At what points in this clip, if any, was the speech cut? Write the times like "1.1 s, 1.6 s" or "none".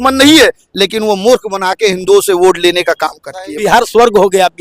3.6 s